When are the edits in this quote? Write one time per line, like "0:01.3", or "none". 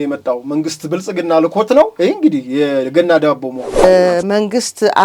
0:03.8